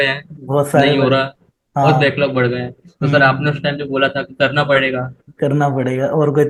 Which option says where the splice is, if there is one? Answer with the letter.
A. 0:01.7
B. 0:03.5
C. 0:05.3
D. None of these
D